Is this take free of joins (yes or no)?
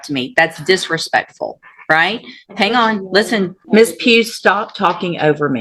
no